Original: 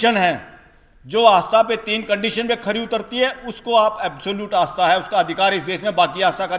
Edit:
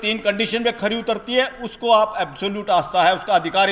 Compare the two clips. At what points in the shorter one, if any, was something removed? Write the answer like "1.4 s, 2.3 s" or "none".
none